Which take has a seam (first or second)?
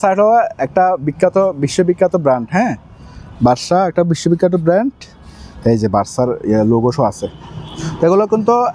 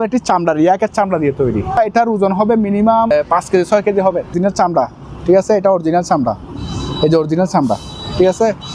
second